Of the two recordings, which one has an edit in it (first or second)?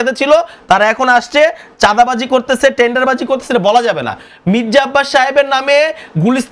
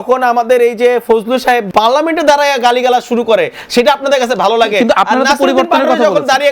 second